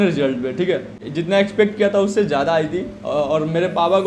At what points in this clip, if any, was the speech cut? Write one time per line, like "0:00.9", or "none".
0:01.0